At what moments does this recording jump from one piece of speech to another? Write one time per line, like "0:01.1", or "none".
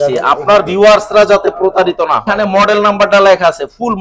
0:02.3